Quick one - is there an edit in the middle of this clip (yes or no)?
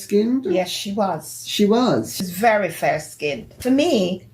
yes